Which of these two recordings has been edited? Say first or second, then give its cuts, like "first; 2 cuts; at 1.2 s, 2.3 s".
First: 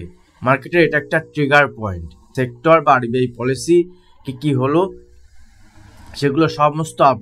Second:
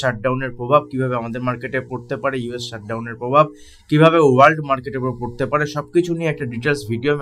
first; 1 cut; at 2.2 s